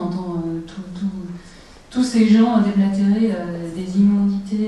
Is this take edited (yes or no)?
yes